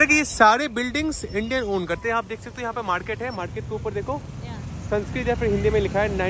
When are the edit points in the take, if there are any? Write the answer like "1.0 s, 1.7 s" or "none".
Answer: none